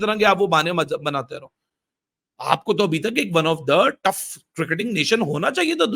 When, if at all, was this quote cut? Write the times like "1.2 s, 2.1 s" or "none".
none